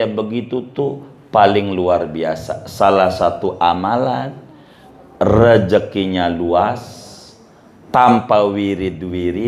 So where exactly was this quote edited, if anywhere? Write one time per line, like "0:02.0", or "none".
none